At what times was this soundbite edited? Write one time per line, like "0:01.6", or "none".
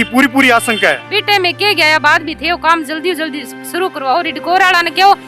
0:01.1